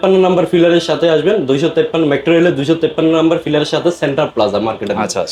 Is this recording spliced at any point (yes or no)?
no